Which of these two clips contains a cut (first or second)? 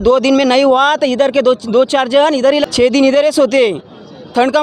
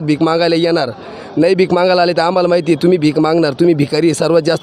first